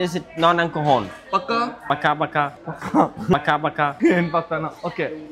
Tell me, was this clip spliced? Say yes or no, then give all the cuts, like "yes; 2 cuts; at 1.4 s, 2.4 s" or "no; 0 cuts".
no; 0 cuts